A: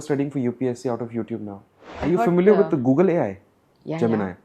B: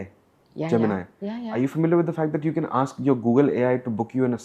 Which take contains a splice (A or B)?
A